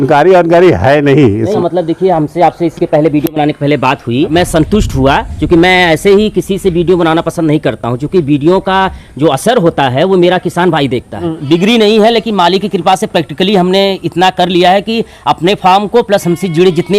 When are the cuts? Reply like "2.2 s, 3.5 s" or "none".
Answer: 1.5 s, 4.3 s, 11.3 s